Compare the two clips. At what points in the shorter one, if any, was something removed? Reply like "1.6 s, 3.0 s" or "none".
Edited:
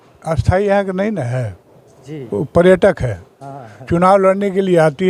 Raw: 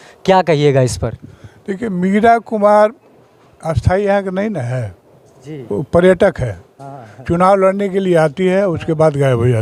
none